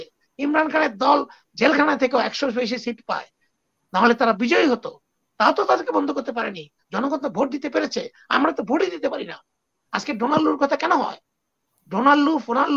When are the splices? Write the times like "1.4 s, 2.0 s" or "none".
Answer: none